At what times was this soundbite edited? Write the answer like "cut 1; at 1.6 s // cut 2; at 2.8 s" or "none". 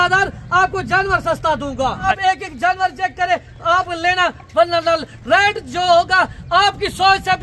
cut 1; at 2.0 s